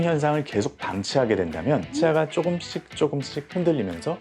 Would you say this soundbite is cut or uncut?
cut